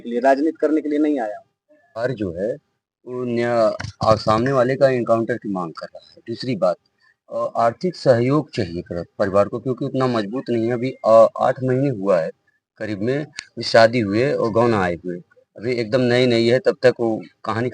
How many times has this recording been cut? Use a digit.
1